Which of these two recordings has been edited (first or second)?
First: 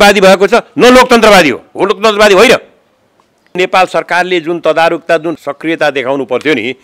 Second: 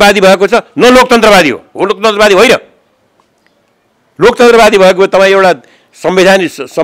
first